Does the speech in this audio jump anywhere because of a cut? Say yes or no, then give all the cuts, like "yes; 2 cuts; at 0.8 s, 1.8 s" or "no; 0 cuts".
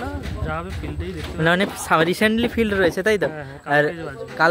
no; 0 cuts